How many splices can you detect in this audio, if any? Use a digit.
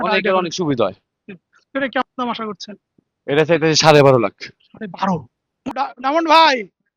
1